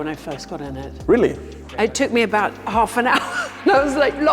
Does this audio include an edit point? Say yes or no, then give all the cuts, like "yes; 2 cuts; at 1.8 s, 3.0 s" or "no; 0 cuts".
yes; 1 cut; at 1.5 s